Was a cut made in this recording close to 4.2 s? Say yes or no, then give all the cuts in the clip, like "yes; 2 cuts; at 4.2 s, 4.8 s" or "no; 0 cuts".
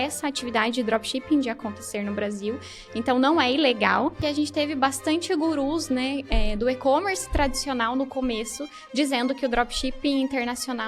yes; 1 cut; at 4.2 s